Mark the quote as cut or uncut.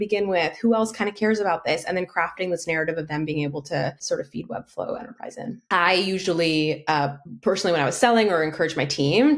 cut